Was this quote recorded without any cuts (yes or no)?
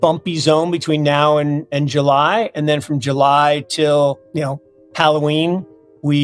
no